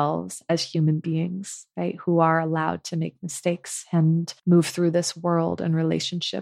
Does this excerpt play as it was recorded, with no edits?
no; 1 cut; at 4.3 s

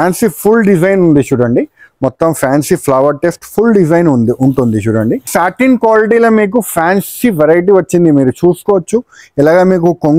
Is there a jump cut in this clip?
yes; 1 cut; at 5.3 s

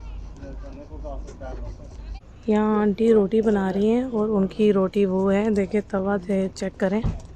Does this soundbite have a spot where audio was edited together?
no; 0 cuts

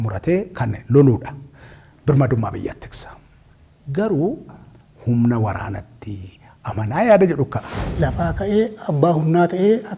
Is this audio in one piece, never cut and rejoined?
no; 2 cuts; at 4.5 s, 7.8 s

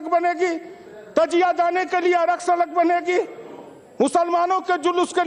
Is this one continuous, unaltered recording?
yes; 0 cuts

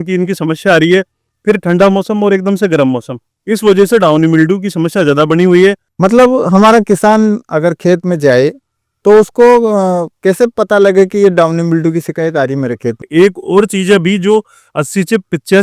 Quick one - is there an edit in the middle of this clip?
yes; 2 cuts; at 5.9 s, 13.0 s

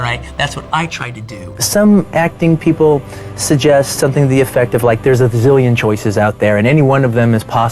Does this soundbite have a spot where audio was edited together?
yes; 1 cut; at 1.6 s

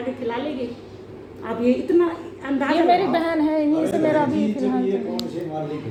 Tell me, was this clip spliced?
no; 0 cuts

